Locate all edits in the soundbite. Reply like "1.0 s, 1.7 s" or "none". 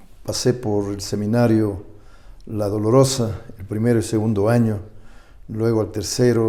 none